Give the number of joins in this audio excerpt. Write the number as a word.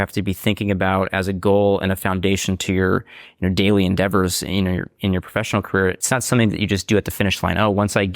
one